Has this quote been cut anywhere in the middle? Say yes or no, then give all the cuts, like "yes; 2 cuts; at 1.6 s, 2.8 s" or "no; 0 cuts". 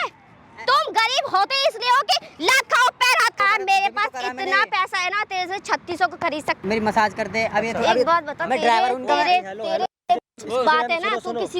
yes; 2 cuts; at 3.4 s, 6.6 s